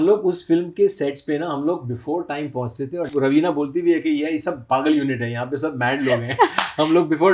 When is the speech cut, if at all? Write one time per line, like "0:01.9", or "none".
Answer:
0:03.1